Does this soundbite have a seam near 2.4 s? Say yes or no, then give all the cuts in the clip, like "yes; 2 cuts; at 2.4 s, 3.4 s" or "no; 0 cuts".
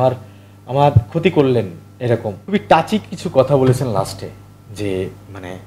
yes; 1 cut; at 2.4 s